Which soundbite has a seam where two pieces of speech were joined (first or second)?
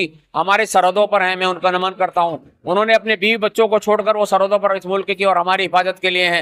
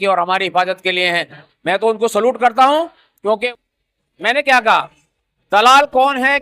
second